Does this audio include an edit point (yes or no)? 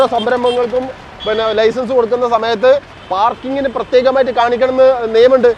no